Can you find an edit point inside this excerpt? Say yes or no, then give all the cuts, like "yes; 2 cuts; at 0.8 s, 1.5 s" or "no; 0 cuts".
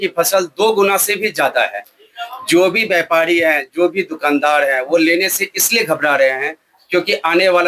no; 0 cuts